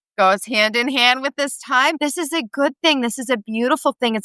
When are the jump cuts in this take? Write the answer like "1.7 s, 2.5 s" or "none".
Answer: 2.0 s